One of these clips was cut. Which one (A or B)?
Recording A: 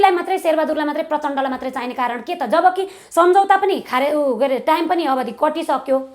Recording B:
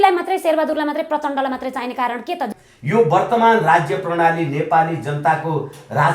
B